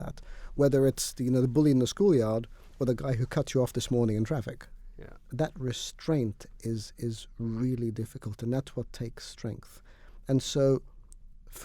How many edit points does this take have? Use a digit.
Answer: 1